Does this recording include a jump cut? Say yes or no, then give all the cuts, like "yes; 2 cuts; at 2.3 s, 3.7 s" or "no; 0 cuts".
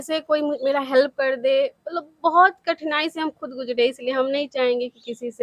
no; 0 cuts